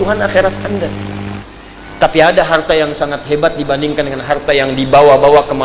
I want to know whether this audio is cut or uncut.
cut